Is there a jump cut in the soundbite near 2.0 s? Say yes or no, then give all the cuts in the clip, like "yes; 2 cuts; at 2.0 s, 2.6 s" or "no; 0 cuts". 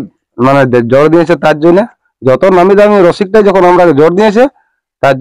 yes; 1 cut; at 2.0 s